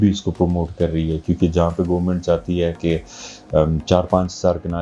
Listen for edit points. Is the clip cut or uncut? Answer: uncut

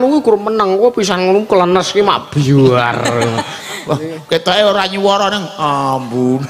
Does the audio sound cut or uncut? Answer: uncut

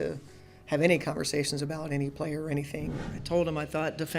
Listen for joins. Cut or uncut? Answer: cut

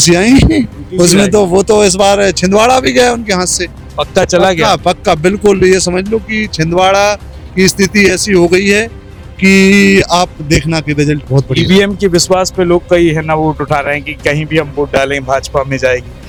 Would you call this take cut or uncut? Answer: uncut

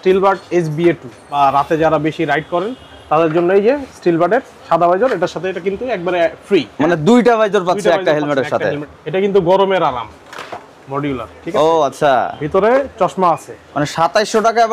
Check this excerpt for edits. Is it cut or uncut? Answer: cut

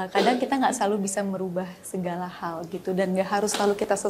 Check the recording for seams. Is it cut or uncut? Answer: uncut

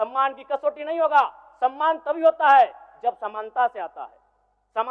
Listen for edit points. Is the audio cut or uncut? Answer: uncut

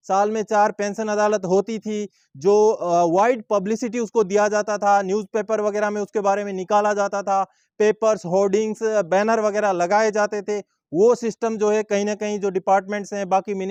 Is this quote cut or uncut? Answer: uncut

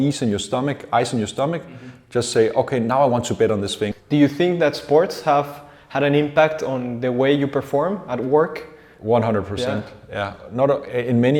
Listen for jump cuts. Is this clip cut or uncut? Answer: cut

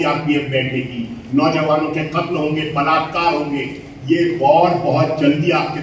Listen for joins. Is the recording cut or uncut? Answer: uncut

